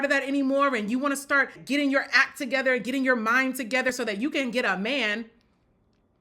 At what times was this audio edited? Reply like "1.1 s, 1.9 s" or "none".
1.6 s, 3.9 s